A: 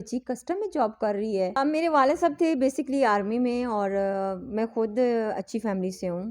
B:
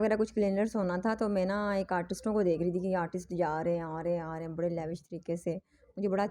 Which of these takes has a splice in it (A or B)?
A